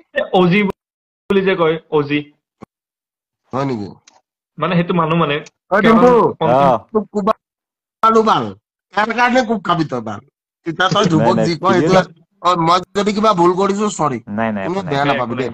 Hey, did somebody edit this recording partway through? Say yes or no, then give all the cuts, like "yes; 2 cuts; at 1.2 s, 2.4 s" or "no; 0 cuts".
yes; 1 cut; at 12.0 s